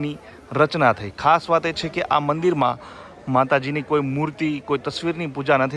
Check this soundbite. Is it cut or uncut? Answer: uncut